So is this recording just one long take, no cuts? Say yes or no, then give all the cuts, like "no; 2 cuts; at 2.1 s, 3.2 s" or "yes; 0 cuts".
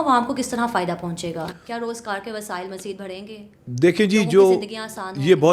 yes; 0 cuts